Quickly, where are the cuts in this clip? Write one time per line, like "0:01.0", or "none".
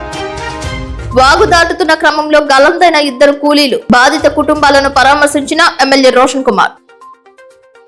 none